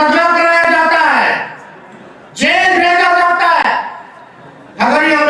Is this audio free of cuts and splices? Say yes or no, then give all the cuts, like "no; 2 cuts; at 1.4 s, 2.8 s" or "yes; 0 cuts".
yes; 0 cuts